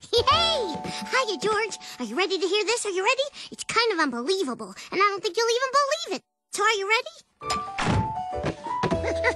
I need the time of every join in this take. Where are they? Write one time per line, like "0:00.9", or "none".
0:08.1

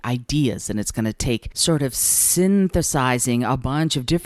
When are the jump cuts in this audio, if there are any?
0:01.5

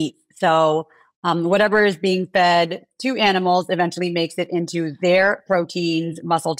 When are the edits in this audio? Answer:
none

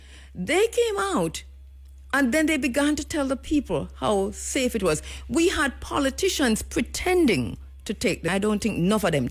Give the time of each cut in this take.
0:08.3

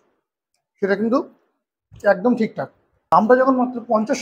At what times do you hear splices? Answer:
0:03.1

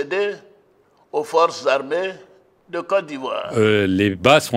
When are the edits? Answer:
0:03.5

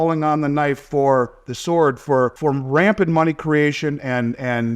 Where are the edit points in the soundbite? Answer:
0:02.4

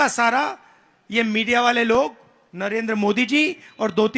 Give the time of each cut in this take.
none

